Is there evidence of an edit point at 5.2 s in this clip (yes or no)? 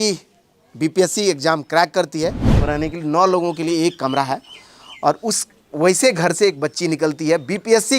no